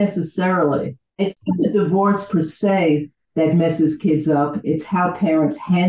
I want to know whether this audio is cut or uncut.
cut